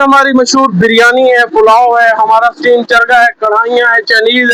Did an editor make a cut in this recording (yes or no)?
no